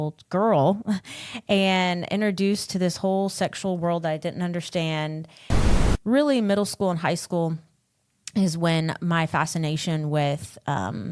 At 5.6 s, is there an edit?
yes; 1 cut; at 5.6 s

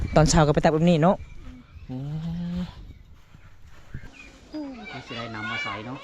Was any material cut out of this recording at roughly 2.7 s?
no; 1 cut; at 4.1 s

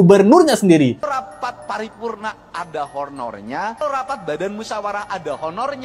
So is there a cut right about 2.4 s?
no; 2 cuts; at 1.0 s, 3.8 s

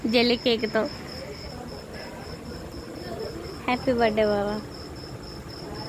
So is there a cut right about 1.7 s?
yes; 1 cut; at 1.7 s

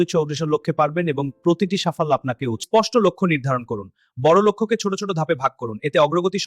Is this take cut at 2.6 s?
yes; 1 cut; at 2.6 s

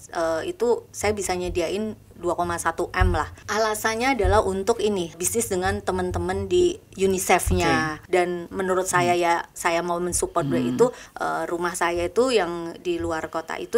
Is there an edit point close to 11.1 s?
yes; 4 cuts; at 3.4 s, 5.2 s, 8.0 s, 11.1 s

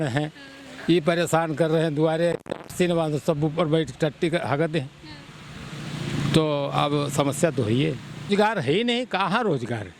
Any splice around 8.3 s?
yes; 1 cut; at 8.3 s

